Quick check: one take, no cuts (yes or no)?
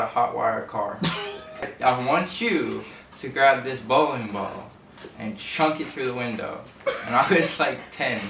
no